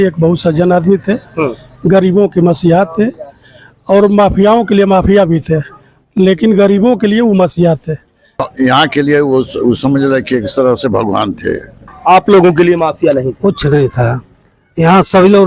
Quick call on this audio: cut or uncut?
cut